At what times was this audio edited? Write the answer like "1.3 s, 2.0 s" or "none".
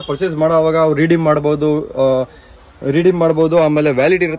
none